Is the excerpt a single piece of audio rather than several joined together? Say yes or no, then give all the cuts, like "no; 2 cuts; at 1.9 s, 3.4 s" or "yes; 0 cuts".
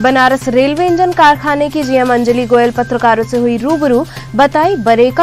yes; 0 cuts